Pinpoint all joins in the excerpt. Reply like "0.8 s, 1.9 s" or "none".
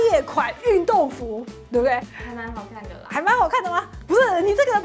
none